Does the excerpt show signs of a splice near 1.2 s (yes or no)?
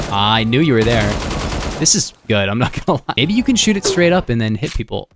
no